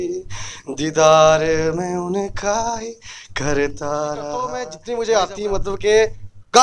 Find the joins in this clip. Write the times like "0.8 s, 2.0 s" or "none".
4.7 s